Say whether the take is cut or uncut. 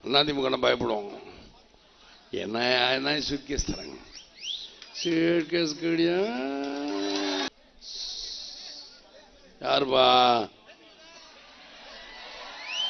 cut